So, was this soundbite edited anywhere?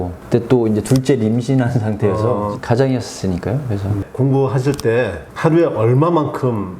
yes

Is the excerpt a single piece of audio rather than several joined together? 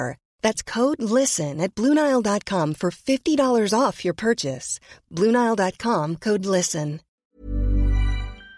no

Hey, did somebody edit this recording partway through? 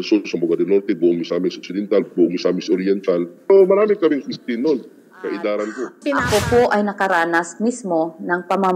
yes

